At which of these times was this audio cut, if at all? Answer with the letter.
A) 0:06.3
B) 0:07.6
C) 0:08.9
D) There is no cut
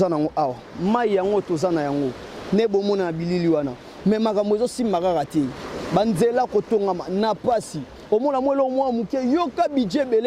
D